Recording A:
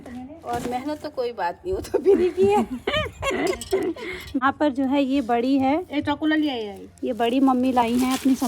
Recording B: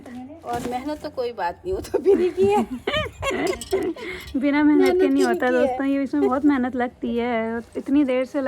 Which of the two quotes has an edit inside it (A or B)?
A